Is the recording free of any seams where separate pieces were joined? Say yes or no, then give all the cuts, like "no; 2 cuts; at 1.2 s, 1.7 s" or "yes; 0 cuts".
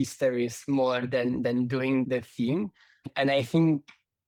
yes; 0 cuts